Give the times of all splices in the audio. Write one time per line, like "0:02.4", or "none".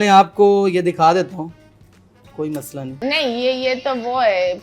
0:02.9